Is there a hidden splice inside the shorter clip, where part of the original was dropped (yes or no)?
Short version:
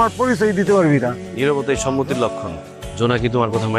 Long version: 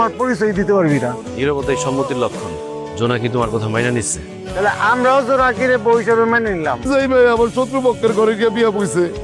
no